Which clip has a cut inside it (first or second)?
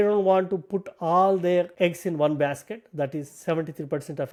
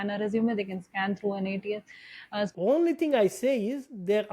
second